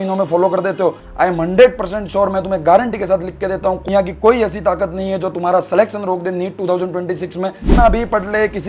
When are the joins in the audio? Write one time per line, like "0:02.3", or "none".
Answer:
0:01.0
0:07.6